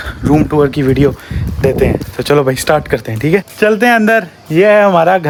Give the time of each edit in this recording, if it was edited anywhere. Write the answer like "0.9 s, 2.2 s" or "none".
none